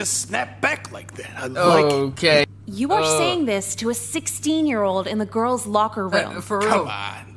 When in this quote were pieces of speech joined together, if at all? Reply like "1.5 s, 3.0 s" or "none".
2.4 s